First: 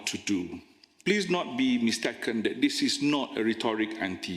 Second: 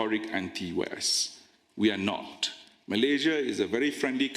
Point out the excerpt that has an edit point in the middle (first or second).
first